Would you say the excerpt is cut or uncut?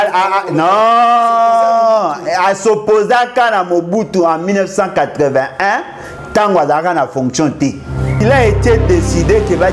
cut